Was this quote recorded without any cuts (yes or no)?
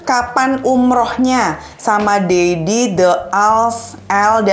yes